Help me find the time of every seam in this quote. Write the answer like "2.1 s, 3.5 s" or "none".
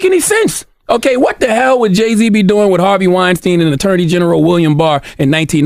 none